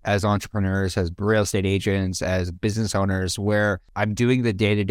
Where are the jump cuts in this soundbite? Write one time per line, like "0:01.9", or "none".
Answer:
0:03.9